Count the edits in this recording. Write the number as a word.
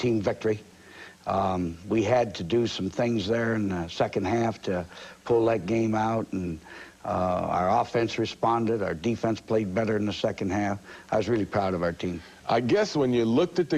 zero